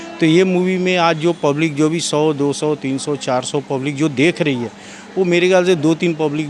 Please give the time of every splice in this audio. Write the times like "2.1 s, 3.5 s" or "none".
none